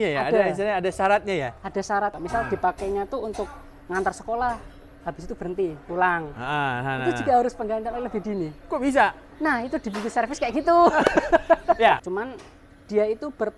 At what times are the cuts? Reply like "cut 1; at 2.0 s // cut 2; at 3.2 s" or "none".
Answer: cut 1; at 2.1 s // cut 2; at 12.0 s